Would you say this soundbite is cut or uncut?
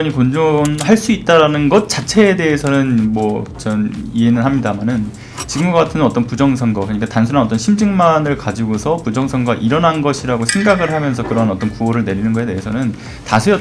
uncut